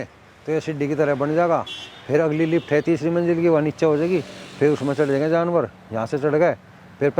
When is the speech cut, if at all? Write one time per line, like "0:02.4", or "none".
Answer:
none